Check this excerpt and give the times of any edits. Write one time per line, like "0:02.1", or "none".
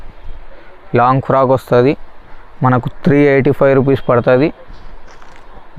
none